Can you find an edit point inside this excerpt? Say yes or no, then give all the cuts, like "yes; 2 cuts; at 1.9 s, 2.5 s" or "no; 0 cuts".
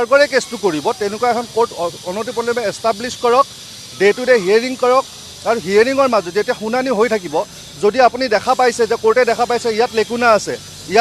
no; 0 cuts